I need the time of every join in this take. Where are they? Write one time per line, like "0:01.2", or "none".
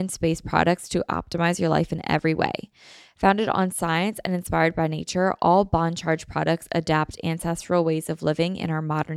none